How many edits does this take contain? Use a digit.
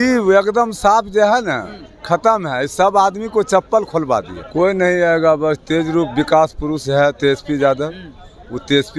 1